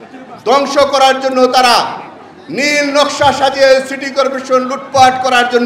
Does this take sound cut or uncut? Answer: uncut